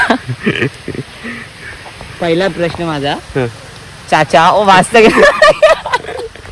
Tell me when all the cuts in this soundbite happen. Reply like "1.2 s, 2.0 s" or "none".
none

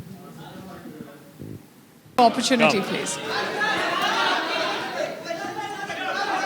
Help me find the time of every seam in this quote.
2.2 s

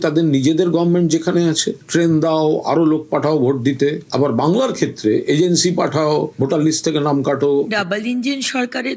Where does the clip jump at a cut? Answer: 7.7 s

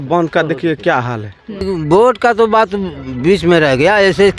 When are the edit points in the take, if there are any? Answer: 1.7 s

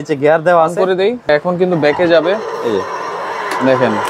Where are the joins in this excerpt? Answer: 1.3 s

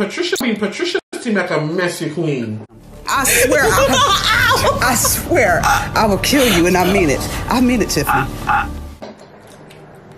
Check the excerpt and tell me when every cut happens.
none

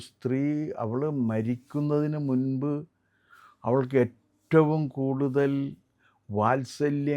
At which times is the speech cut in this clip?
none

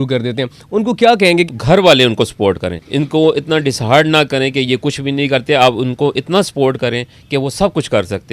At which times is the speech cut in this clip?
1.5 s, 2.8 s

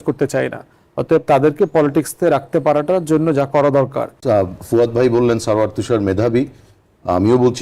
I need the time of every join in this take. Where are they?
4.1 s

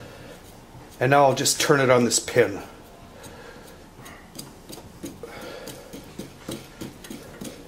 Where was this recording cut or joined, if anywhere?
none

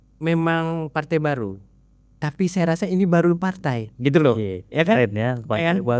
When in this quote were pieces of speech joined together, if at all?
none

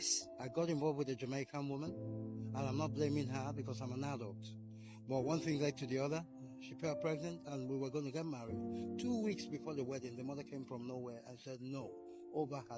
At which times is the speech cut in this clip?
none

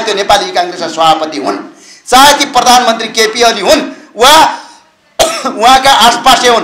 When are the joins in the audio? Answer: none

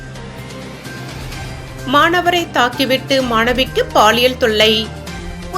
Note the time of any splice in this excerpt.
1.5 s

